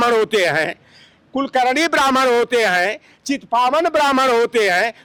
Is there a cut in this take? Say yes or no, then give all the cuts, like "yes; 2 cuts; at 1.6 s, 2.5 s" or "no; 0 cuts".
no; 0 cuts